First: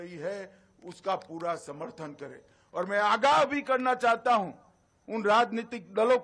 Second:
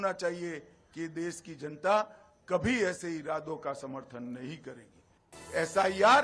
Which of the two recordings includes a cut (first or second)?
second